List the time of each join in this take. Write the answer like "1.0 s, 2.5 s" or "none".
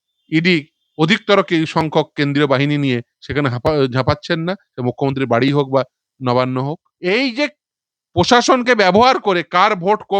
6.9 s